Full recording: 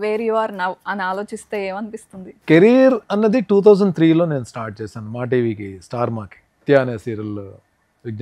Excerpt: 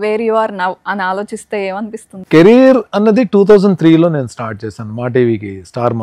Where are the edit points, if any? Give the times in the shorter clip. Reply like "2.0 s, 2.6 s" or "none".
2.1 s